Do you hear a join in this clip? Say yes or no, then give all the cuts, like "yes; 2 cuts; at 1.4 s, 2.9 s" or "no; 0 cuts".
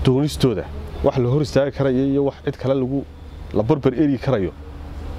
no; 0 cuts